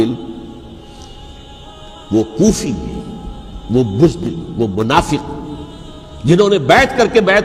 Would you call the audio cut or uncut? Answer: uncut